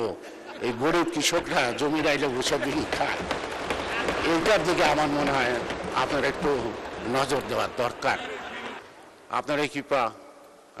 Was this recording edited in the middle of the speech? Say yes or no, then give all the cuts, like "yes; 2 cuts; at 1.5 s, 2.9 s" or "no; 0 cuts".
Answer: yes; 1 cut; at 8.8 s